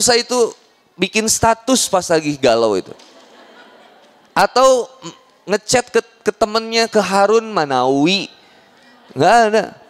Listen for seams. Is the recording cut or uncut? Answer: uncut